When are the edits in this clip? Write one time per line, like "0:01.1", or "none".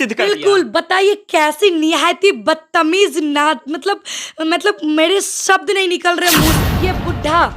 0:06.6